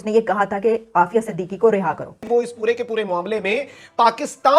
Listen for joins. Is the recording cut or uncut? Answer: cut